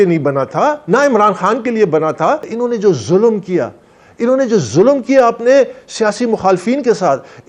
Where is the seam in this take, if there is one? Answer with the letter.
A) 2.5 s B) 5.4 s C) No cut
A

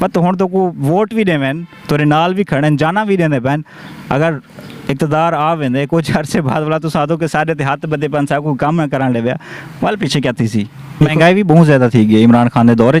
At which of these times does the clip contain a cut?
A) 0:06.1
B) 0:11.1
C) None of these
B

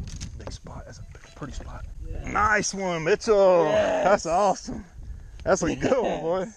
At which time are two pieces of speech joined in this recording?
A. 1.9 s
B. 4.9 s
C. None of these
A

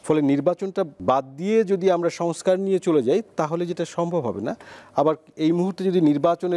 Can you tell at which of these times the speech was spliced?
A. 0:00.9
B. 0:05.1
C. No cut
A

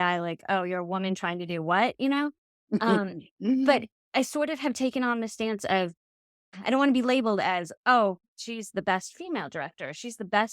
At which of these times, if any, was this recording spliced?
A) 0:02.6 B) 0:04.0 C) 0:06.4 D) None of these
C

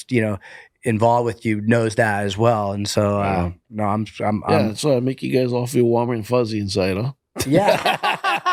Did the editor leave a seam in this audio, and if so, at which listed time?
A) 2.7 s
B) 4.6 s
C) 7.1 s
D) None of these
D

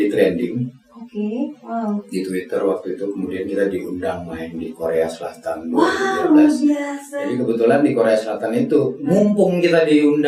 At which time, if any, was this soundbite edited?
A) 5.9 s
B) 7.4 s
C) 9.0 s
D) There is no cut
D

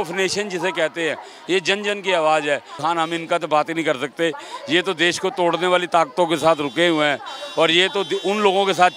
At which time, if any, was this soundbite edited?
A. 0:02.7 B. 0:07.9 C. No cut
A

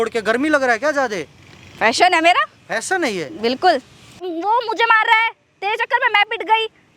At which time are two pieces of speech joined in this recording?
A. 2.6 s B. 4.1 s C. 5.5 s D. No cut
B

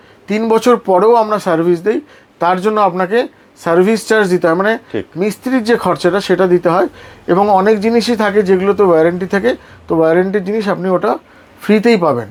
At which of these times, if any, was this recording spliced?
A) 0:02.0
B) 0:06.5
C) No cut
C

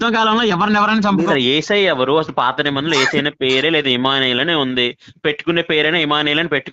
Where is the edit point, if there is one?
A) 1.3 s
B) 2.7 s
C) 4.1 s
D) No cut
A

